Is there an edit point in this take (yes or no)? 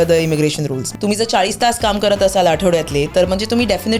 yes